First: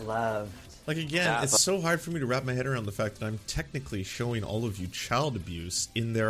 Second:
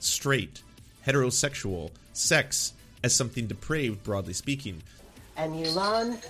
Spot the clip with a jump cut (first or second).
second